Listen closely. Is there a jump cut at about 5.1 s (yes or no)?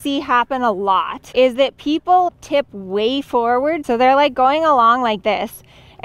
no